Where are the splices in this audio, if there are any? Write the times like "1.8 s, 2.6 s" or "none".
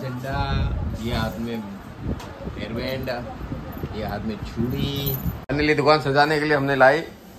5.4 s